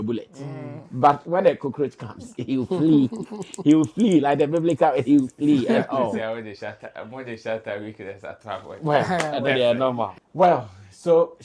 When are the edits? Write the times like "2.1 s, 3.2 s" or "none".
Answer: 10.2 s